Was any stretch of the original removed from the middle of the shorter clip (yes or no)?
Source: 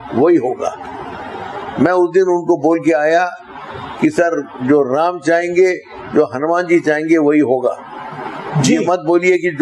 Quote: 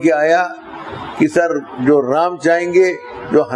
no